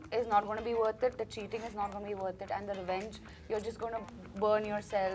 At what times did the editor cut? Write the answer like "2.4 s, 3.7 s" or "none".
4.2 s